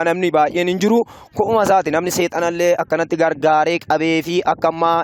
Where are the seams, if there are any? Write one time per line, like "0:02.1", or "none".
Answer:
none